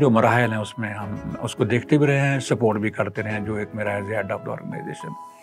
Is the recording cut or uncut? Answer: uncut